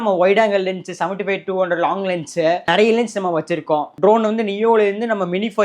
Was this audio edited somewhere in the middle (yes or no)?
yes